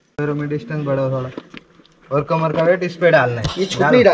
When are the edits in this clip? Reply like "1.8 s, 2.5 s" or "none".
none

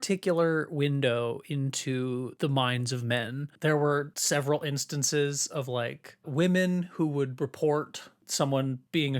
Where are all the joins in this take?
2.3 s, 3.4 s, 4.2 s

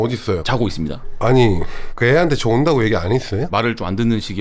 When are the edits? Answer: 1.1 s, 1.8 s, 3.5 s

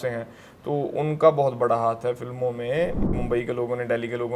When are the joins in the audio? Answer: 3.1 s

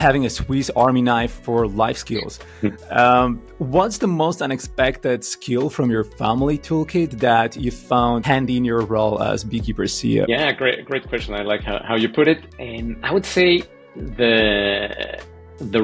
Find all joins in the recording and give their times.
8.2 s, 10.3 s

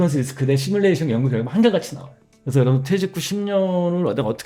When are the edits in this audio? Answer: none

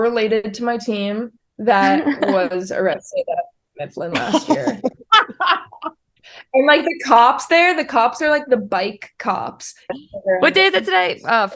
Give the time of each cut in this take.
9.9 s

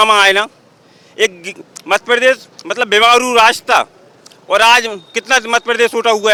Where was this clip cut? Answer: none

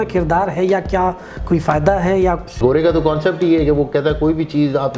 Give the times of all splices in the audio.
2.6 s

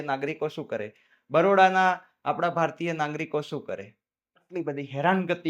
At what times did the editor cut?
4.4 s

